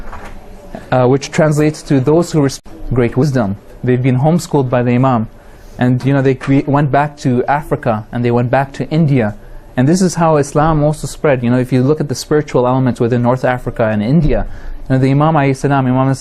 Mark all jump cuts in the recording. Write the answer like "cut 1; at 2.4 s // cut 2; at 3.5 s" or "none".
none